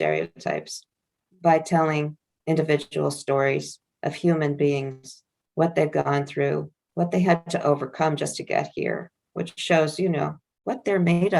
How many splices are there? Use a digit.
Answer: 3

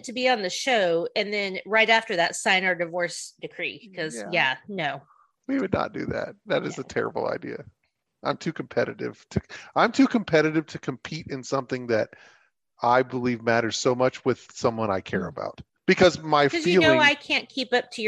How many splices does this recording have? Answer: 1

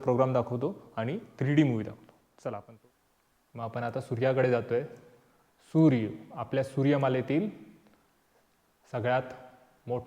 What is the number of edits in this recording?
1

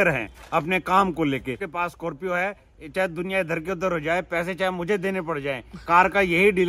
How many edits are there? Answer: 2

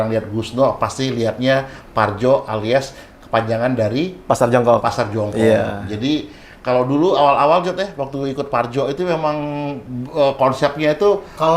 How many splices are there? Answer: 0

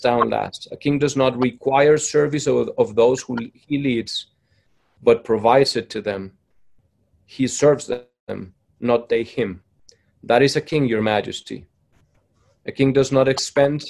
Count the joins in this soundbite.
0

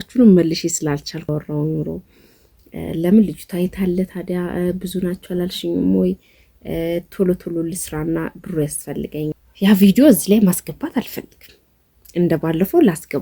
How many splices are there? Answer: 2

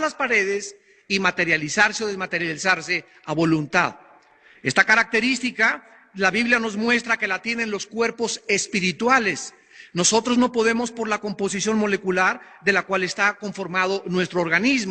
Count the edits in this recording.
1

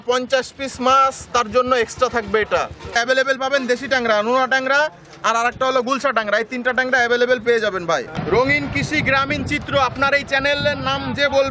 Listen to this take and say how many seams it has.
2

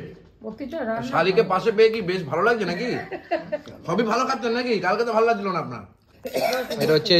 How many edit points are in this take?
1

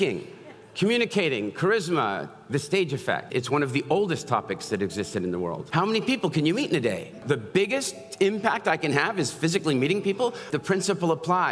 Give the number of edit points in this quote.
4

